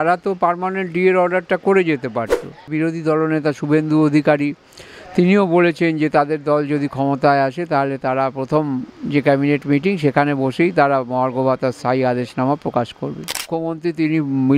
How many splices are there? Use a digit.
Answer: 2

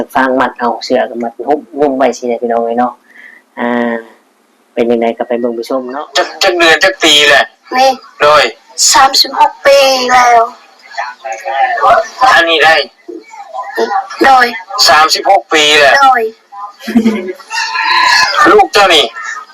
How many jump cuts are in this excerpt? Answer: 1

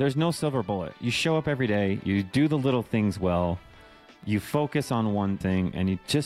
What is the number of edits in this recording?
1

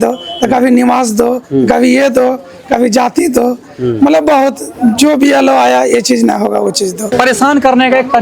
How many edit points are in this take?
1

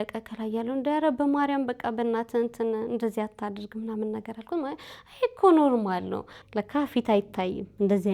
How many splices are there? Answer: 1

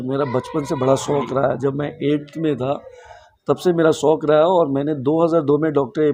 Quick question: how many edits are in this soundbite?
0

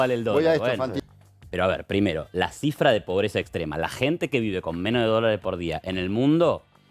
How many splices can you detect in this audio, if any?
1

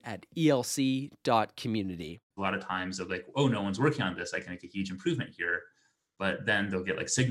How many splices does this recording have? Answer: 1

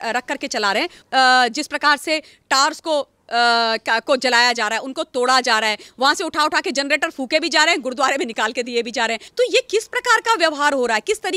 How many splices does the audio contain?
2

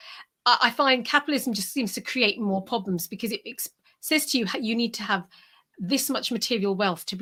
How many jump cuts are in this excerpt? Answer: 0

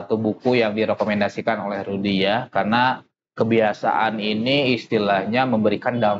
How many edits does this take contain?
0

